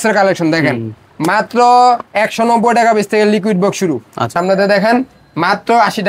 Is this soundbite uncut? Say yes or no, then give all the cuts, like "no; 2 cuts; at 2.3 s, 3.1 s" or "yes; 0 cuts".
no; 1 cut; at 4.3 s